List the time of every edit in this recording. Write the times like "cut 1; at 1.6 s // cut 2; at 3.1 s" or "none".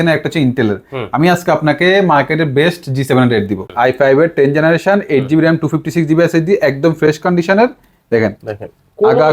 cut 1; at 3.6 s